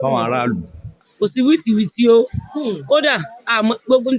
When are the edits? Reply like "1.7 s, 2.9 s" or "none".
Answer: 1.0 s